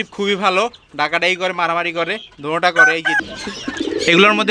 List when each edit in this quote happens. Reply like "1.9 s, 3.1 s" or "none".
3.2 s